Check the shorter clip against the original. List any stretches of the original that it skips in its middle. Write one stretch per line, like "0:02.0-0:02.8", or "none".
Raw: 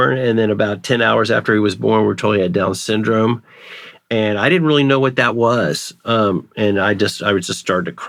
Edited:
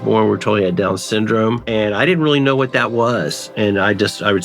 0:03.4-0:04.1
0:05.9-0:06.5